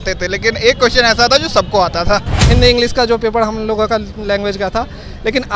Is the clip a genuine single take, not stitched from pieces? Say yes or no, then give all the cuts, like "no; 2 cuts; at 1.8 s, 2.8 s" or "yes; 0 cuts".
no; 1 cut; at 2.3 s